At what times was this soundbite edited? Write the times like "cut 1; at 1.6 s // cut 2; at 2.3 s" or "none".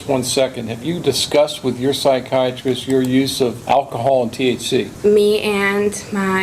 cut 1; at 3.6 s // cut 2; at 4.9 s